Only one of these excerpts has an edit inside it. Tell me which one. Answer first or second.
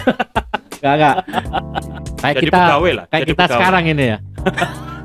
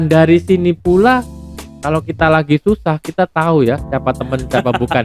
first